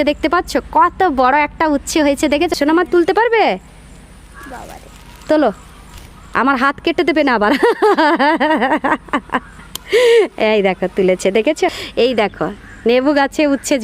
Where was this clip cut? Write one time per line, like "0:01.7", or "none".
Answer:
0:02.5
0:11.8